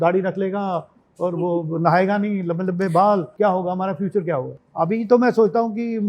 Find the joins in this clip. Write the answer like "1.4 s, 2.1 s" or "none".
3.3 s, 4.6 s